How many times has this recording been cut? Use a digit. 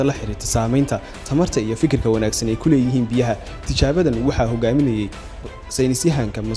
1